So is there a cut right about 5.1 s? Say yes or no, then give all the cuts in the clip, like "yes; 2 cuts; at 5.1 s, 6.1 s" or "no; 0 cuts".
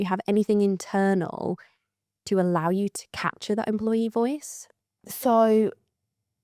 yes; 1 cut; at 5.1 s